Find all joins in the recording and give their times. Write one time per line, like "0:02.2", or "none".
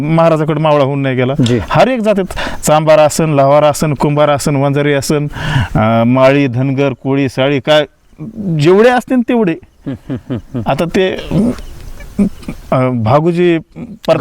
none